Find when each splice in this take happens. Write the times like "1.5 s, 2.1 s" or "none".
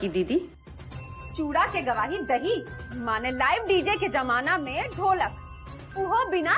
none